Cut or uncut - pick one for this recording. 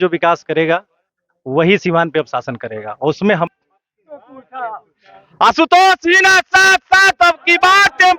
cut